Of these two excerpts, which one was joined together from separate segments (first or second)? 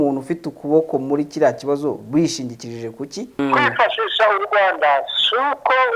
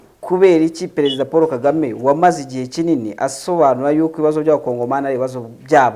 first